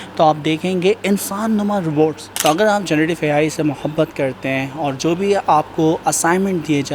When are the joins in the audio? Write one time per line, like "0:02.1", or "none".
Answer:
0:02.3